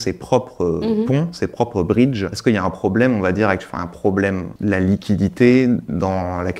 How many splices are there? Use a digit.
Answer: 2